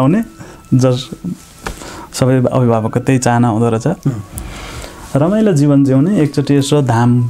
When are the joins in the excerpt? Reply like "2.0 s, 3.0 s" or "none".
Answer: none